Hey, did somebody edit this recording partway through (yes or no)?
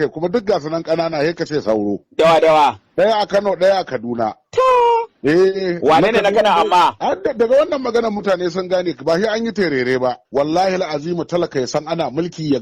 yes